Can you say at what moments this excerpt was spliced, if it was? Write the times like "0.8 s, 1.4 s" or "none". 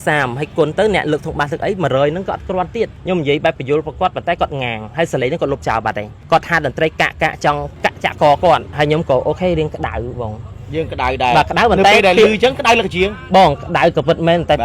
3.0 s, 6.1 s, 7.7 s, 8.7 s